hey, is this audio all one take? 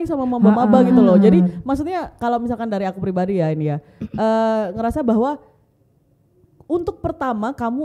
yes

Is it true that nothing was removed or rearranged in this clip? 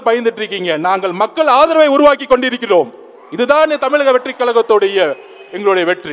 yes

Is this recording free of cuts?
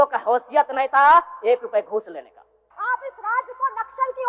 no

